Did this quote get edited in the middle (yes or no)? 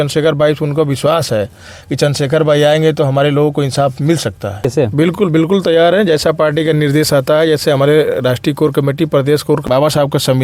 yes